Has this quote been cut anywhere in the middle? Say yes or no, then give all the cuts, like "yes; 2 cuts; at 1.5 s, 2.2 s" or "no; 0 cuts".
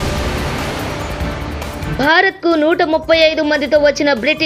no; 0 cuts